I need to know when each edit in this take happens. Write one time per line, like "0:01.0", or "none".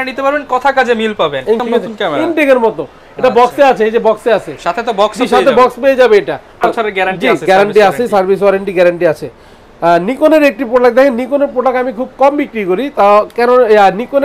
0:01.6
0:06.6